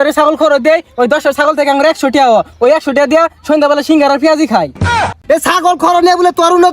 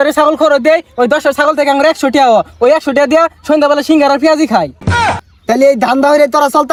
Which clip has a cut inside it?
first; 1 cut; at 5.0 s

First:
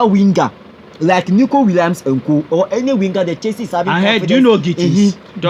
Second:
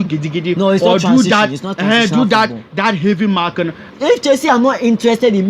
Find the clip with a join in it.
second; 1 cut; at 3.9 s

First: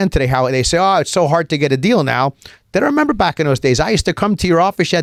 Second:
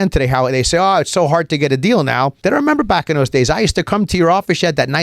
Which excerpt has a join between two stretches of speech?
second; 1 cut; at 2.4 s

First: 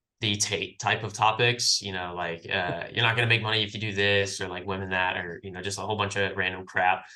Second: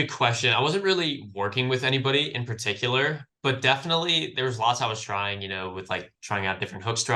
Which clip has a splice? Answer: second; 1 cut; at 3.3 s

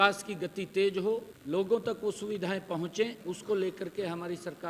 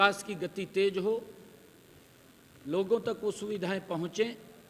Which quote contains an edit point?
first; 2 cuts; at 1.3 s, 3.2 s

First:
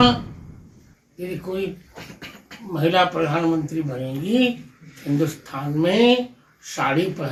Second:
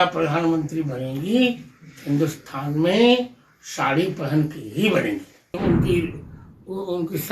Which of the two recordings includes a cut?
second; 1 cut; at 5.6 s

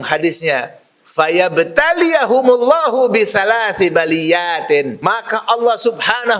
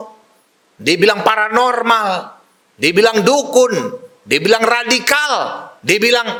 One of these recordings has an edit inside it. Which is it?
first; 1 cut; at 4.9 s

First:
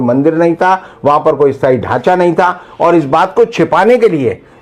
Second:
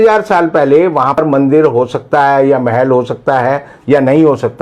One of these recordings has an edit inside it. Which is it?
second; 1 cut; at 1.2 s

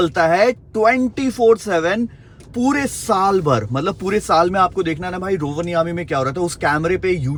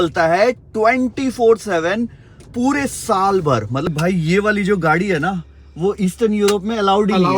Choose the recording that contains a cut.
second; 1 cut; at 3.9 s

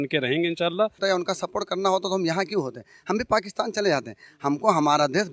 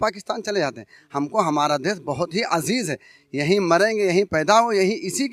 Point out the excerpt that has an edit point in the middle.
first; 1 cut; at 1.0 s

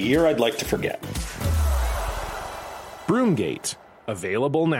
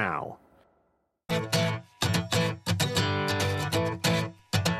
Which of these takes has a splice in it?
second; 1 cut; at 1.3 s

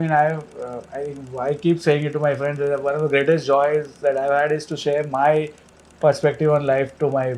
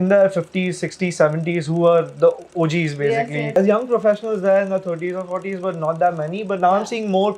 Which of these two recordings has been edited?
second; 1 cut; at 3.6 s

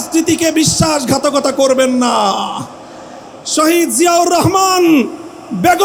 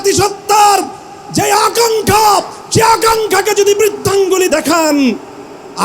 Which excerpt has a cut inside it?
second; 1 cut; at 4.5 s

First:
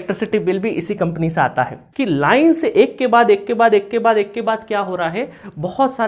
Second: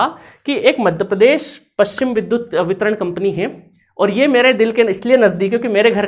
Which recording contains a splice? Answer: first; 1 cut; at 1.8 s

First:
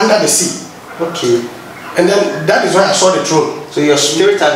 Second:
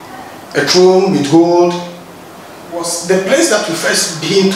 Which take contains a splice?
second; 1 cut; at 2.9 s

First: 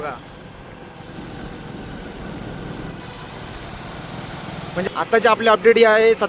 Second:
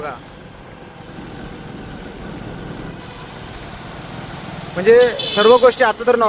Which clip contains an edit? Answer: first; 1 cut; at 4.7 s

